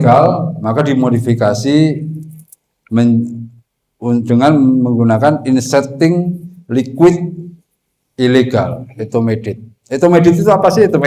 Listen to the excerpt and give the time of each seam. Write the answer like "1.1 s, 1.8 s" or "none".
none